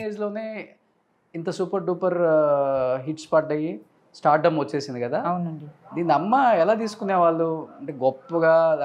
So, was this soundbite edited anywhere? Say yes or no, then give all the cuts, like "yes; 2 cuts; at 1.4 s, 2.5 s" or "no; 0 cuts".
no; 0 cuts